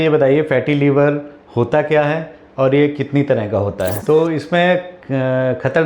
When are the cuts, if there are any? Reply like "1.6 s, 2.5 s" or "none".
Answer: 3.9 s